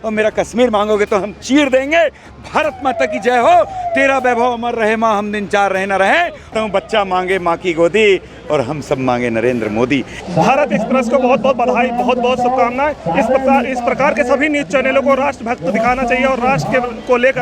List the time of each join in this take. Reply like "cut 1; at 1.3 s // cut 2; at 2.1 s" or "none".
cut 1; at 6.5 s // cut 2; at 10.2 s